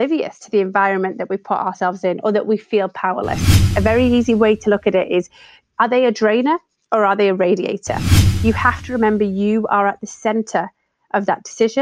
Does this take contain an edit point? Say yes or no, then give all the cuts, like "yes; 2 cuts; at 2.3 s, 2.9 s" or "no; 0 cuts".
yes; 3 cuts; at 3.7 s, 5.7 s, 8.2 s